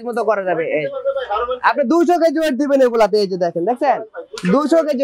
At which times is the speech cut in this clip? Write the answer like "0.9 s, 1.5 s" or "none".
none